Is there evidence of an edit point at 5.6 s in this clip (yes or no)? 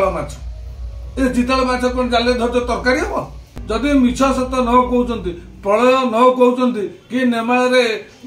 no